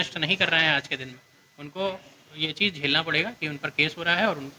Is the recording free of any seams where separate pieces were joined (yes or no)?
yes